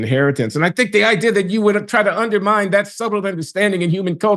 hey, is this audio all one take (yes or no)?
yes